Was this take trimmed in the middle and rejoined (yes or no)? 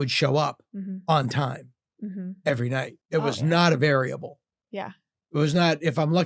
yes